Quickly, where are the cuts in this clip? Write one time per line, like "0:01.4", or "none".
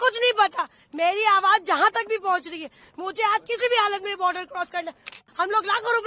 0:05.2